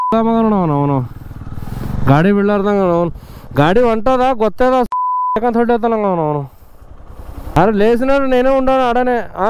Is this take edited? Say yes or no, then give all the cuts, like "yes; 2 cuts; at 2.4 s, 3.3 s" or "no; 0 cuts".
yes; 1 cut; at 7.6 s